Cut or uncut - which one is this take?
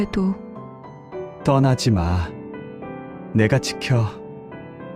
cut